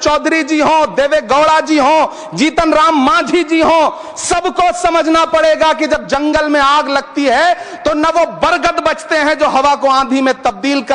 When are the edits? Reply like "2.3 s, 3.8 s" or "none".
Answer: none